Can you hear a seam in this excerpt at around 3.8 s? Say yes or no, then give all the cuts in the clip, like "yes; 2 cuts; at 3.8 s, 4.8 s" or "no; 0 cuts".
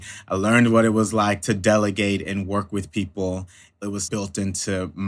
yes; 2 cuts; at 1.4 s, 3.8 s